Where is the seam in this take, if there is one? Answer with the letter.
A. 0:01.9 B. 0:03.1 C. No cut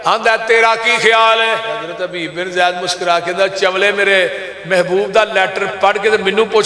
A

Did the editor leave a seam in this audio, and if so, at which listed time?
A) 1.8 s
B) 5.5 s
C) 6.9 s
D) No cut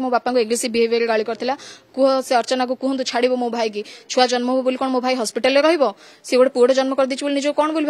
D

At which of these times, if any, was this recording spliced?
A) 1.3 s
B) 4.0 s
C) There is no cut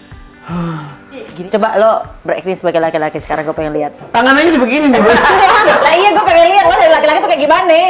A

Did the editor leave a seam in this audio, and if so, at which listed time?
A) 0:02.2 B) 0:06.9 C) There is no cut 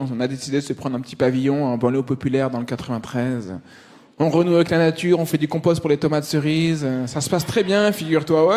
C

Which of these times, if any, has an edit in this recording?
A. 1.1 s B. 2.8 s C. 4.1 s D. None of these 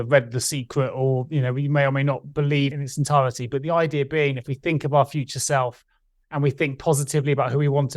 B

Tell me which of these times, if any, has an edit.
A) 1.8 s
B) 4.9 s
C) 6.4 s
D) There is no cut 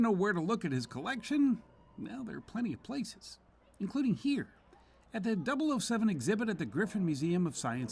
D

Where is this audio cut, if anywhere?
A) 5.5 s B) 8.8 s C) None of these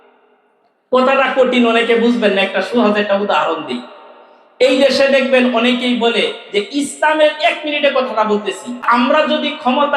B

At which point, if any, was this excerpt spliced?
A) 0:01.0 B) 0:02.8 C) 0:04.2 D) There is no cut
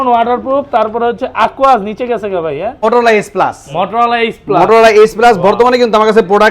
B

